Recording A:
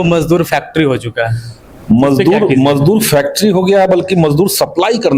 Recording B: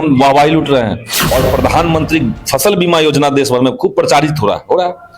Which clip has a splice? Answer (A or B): B